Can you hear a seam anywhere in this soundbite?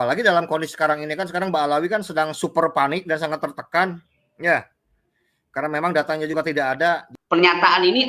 yes; 1 cut; at 7.1 s

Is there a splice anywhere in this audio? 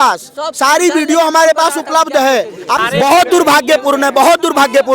yes; 1 cut; at 2.8 s

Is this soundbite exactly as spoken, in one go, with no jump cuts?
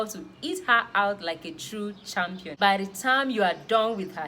no; 1 cut; at 2.5 s

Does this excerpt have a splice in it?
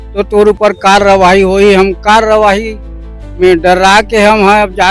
no; 0 cuts

